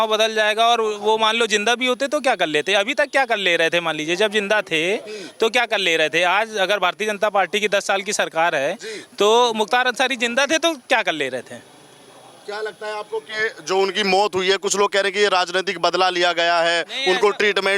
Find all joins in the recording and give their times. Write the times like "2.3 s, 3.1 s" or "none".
none